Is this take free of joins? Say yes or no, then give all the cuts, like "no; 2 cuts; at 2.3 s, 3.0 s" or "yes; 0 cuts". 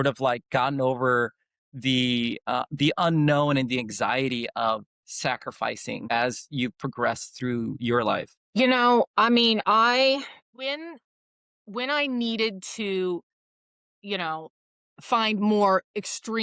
no; 3 cuts; at 6.0 s, 8.4 s, 10.4 s